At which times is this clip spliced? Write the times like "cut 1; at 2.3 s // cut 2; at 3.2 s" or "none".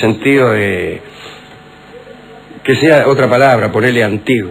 none